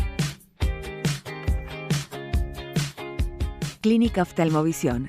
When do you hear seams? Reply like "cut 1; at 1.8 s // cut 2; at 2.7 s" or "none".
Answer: cut 1; at 3.7 s